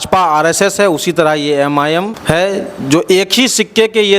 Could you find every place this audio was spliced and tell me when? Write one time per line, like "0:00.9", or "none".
0:02.1